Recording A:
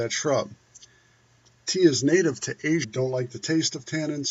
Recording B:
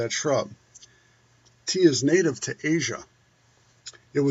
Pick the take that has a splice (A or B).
B